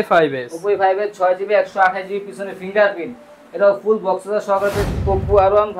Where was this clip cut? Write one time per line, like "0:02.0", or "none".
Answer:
0:04.8